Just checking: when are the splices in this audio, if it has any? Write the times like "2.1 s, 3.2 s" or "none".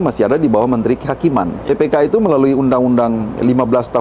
1.7 s